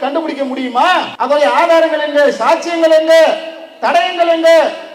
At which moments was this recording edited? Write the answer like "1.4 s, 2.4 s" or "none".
1.1 s